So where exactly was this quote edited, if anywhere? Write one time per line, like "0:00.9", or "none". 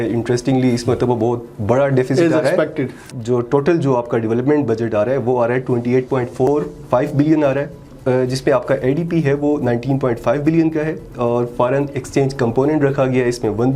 0:03.0
0:07.9

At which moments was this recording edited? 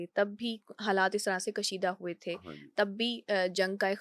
none

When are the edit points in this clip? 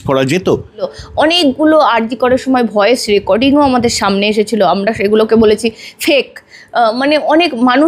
0:01.0

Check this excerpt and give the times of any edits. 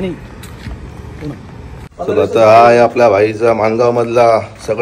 0:01.9

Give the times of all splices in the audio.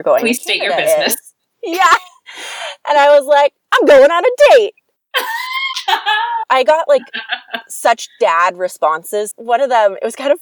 0:09.3

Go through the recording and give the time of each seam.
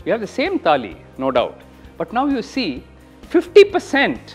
none

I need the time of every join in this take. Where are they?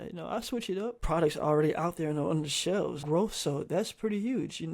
0:01.0
0:03.0

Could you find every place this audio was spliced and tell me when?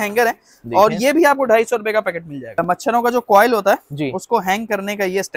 0:02.6

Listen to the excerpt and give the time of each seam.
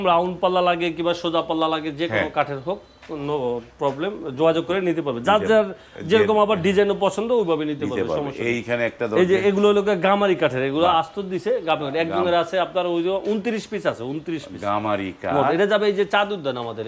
none

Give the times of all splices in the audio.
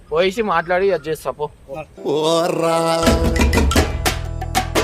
none

